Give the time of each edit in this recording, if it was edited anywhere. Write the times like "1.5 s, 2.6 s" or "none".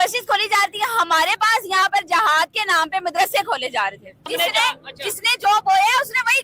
4.3 s